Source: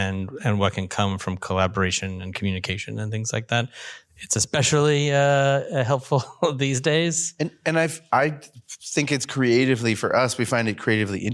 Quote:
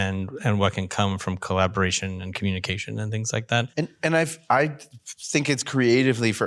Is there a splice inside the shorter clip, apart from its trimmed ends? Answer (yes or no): yes